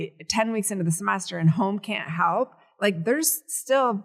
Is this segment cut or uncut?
uncut